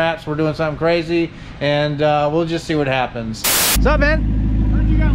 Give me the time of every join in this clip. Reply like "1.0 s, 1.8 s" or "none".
3.6 s